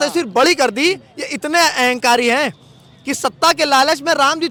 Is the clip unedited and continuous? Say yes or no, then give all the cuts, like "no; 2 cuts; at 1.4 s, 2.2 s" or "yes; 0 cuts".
yes; 0 cuts